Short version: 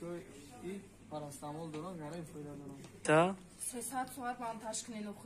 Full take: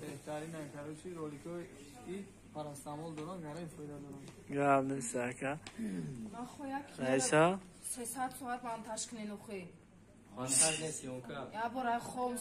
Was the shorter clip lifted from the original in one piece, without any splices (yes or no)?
no